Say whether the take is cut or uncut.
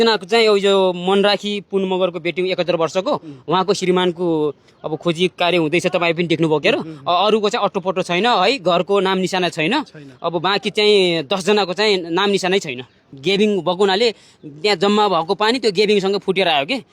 cut